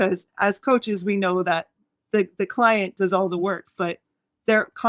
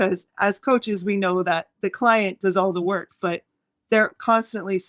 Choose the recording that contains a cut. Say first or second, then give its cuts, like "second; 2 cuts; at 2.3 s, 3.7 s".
second; 1 cut; at 1.8 s